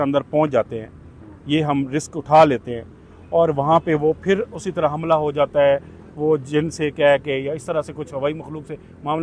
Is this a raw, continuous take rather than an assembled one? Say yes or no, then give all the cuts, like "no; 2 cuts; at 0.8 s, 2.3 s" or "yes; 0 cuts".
yes; 0 cuts